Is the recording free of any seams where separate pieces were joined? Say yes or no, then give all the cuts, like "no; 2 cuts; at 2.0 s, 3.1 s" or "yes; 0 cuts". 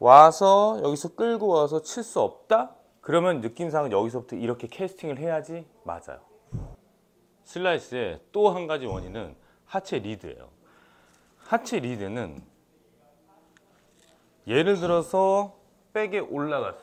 yes; 0 cuts